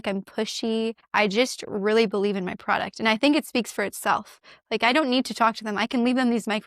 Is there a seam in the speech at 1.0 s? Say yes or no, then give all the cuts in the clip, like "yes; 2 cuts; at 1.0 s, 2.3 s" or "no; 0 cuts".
yes; 1 cut; at 1.0 s